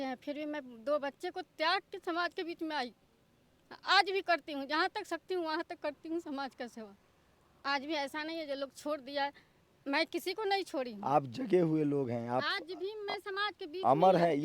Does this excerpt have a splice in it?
no; 0 cuts

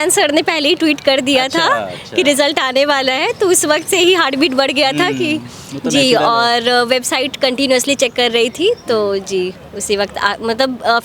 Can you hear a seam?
no; 0 cuts

